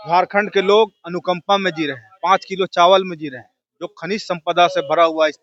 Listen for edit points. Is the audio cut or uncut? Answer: uncut